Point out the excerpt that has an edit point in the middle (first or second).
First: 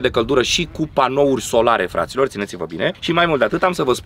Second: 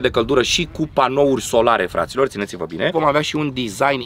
second